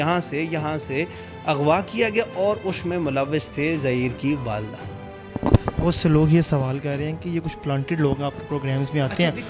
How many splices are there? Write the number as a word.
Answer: zero